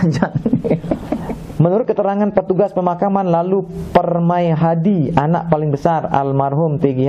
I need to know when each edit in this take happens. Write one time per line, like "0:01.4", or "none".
0:01.1